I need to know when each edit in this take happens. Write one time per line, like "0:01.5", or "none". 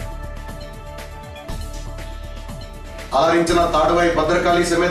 0:01.0